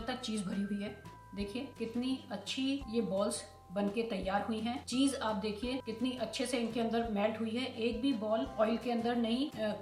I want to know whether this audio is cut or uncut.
cut